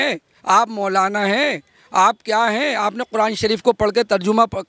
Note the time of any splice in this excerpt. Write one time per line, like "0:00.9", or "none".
none